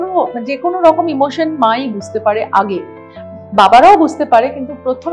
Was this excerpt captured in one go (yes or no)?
yes